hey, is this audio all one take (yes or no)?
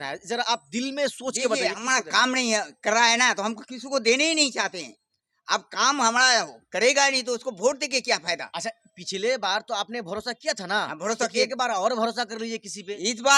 yes